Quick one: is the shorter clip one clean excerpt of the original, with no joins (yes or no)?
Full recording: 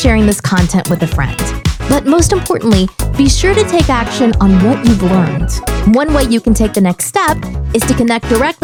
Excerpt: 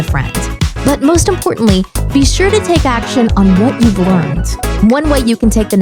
yes